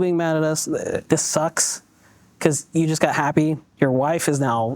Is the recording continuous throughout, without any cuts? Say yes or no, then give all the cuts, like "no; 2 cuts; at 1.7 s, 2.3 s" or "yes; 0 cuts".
no; 2 cuts; at 1.0 s, 3.7 s